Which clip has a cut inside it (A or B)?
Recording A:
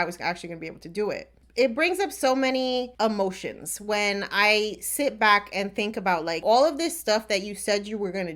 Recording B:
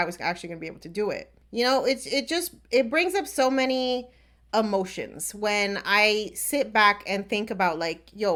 A